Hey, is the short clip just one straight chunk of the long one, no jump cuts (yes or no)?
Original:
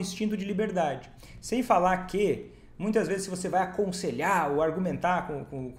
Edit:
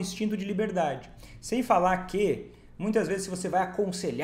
yes